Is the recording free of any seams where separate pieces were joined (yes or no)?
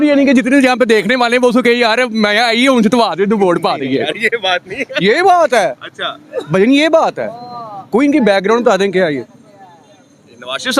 yes